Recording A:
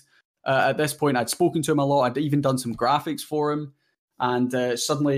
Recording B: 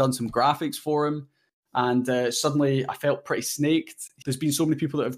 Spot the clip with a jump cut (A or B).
B